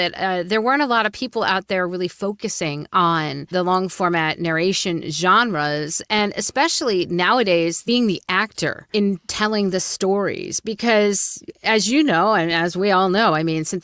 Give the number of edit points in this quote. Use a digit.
3